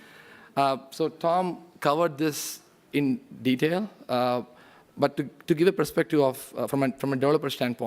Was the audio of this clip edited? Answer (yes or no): yes